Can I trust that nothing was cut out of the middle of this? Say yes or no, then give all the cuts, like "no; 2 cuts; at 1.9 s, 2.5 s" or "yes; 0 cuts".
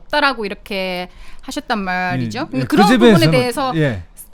yes; 0 cuts